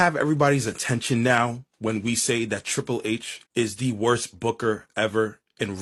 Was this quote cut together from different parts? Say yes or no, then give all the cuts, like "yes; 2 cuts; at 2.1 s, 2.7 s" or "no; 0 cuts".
no; 0 cuts